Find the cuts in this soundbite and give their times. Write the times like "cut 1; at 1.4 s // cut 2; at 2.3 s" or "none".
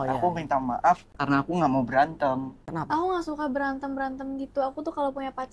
cut 1; at 1.1 s // cut 2; at 2.6 s

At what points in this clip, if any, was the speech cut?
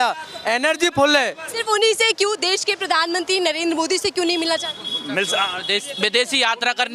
cut 1; at 1.6 s

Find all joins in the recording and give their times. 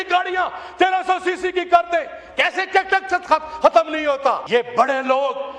cut 1; at 4.4 s

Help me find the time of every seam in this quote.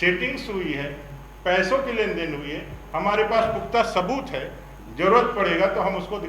none

